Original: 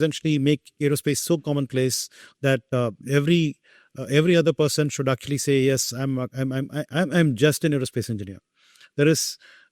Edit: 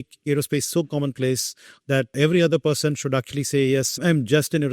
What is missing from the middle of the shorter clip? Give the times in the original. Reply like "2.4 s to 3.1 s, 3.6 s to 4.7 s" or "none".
2.6 s to 4.0 s, 5.9 s to 7.1 s

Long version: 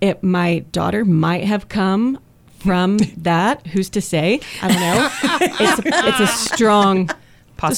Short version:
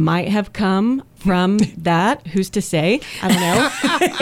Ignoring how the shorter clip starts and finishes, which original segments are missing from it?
2.3 s to 2.5 s

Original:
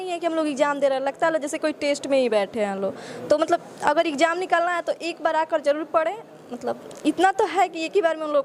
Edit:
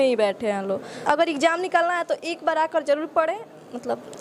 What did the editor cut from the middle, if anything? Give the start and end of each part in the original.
3.1 s to 3.7 s

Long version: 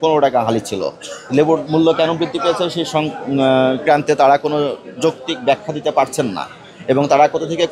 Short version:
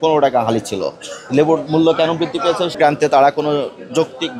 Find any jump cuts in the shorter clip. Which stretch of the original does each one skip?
2.7 s to 3.8 s

